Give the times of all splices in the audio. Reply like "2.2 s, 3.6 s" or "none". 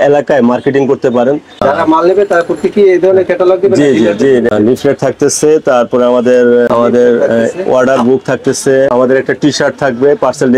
1.6 s, 4.5 s, 6.7 s, 8.9 s